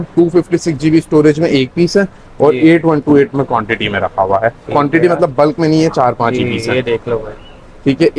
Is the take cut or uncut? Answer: uncut